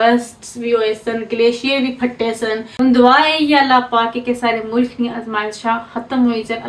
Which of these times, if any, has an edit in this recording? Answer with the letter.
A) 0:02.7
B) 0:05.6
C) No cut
A